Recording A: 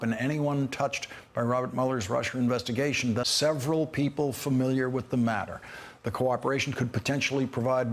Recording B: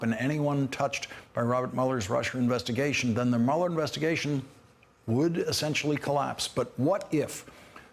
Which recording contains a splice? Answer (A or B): B